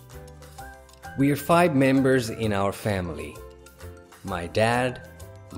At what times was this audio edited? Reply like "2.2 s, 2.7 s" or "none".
1.1 s